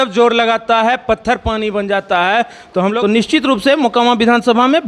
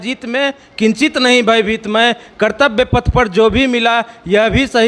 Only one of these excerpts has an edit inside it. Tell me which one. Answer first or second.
first